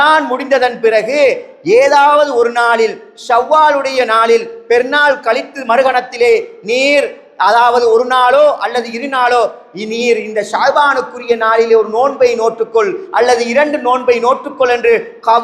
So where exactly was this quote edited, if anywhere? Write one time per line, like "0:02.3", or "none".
none